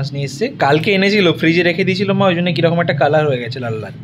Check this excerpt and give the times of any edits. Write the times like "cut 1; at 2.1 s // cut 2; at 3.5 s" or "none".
none